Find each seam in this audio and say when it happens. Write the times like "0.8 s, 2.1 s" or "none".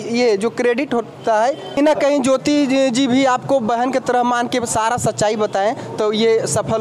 1.8 s